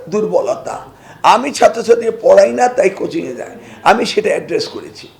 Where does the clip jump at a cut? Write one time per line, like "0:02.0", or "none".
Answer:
none